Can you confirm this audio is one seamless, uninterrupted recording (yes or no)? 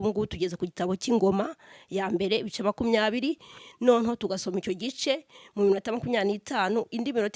yes